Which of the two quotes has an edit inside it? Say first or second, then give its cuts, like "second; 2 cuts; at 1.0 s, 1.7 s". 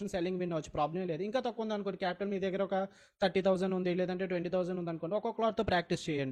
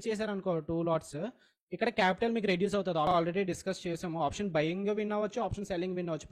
second; 1 cut; at 3.1 s